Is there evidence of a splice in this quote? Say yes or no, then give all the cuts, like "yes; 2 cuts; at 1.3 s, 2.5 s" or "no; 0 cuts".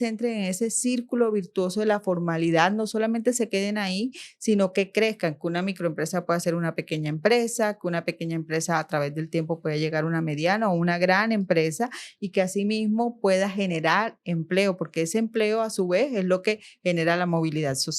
no; 0 cuts